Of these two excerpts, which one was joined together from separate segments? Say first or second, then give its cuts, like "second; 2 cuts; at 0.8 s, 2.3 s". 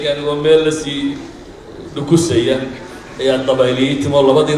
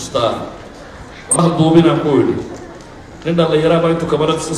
second; 1 cut; at 1.4 s